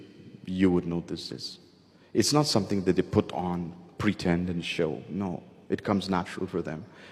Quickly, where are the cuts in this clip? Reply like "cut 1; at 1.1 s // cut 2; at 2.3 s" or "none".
none